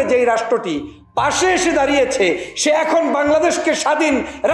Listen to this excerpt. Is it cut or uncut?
uncut